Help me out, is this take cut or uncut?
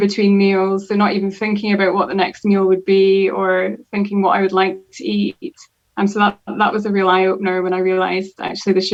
uncut